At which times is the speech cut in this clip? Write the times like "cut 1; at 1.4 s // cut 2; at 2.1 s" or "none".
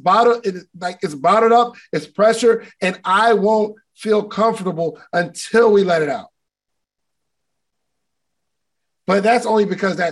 none

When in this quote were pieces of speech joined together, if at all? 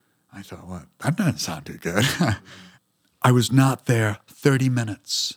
cut 1; at 2.5 s

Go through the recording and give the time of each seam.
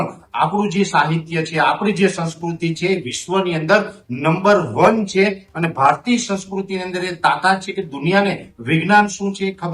none

